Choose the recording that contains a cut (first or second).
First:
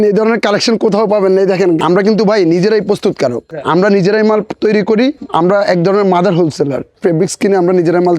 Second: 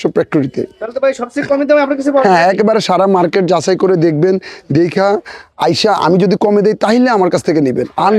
first